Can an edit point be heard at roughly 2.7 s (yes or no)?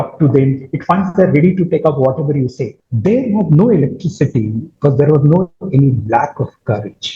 yes